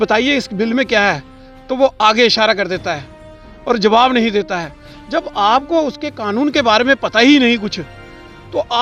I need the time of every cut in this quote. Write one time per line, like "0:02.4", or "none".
none